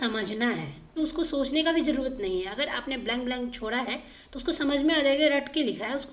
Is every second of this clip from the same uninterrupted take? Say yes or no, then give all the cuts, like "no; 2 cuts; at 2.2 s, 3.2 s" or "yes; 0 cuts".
no; 1 cut; at 0.9 s